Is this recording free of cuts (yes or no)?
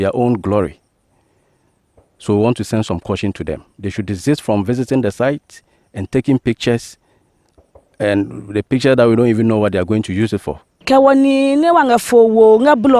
no